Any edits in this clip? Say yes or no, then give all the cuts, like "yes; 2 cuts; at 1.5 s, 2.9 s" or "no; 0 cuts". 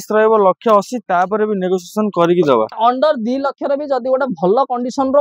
yes; 1 cut; at 2.8 s